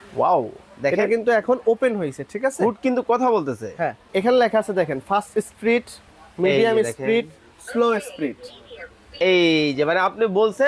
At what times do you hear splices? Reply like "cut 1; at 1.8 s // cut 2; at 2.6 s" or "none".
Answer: cut 1; at 4.1 s